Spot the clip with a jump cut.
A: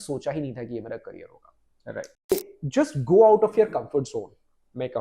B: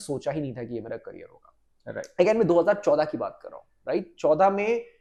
A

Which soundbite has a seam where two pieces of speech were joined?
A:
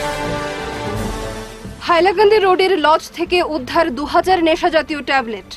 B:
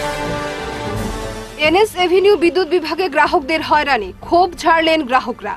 B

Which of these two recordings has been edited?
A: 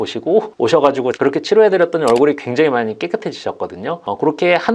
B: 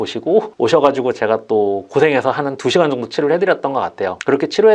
A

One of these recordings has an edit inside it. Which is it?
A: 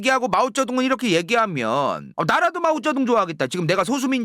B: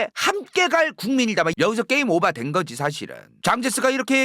B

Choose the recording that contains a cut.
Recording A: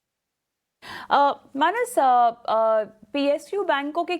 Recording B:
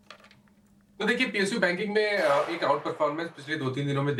A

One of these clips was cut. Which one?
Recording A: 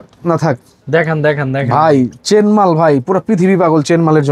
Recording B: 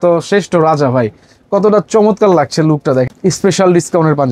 B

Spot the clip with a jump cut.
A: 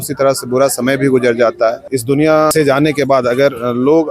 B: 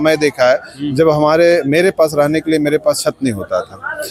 A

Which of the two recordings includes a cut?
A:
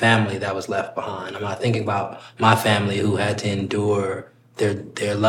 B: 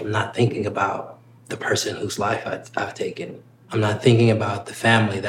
B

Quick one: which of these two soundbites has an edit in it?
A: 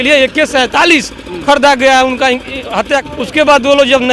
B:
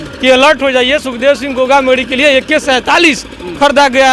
A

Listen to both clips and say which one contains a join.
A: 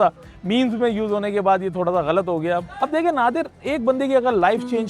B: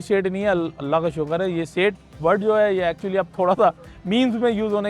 A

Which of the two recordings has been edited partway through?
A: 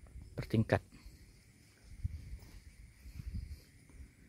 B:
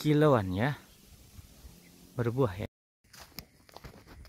B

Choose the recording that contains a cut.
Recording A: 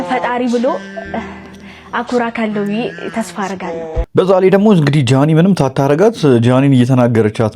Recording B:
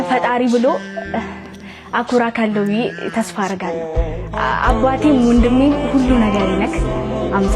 A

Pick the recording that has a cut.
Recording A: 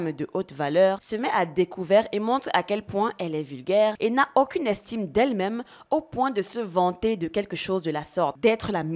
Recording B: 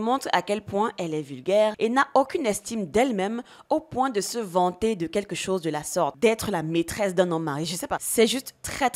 B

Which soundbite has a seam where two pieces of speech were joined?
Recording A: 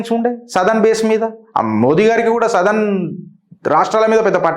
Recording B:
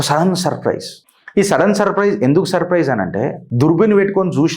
B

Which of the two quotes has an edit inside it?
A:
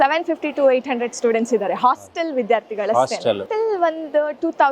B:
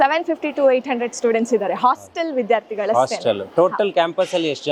A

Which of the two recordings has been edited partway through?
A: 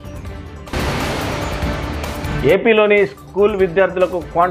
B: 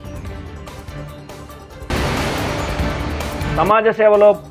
A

